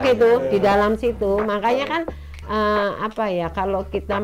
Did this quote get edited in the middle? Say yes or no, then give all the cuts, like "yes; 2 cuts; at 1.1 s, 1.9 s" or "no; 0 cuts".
no; 0 cuts